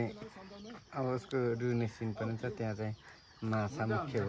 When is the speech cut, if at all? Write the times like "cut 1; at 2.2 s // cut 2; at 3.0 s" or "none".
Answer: none